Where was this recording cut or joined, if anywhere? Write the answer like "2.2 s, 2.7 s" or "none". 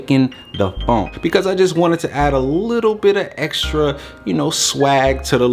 1.2 s